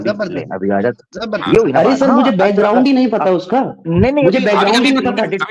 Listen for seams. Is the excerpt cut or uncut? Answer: uncut